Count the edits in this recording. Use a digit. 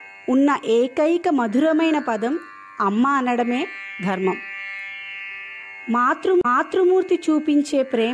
1